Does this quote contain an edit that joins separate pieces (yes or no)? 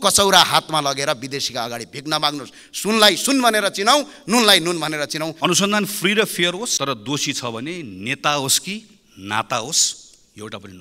yes